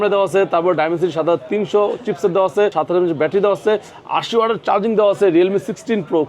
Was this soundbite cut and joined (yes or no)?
yes